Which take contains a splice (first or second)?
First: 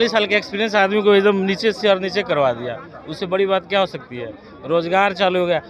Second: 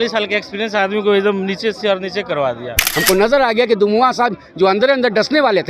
second